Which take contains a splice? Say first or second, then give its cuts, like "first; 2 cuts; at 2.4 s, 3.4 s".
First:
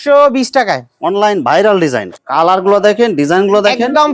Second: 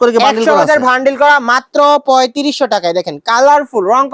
first; 1 cut; at 2.1 s